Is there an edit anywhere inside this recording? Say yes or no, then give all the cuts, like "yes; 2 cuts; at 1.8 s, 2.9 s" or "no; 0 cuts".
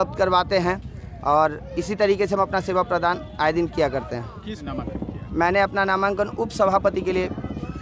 yes; 1 cut; at 4.6 s